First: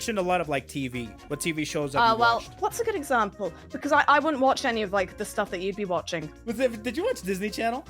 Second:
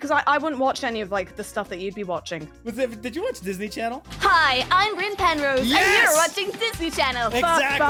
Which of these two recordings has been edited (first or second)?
first